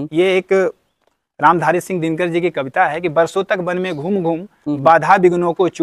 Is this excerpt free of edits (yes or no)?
yes